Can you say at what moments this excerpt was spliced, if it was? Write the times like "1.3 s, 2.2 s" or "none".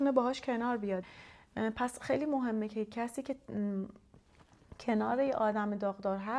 1.1 s